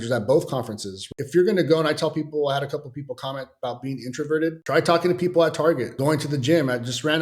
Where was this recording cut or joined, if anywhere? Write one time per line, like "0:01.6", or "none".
0:01.0
0:04.6
0:05.9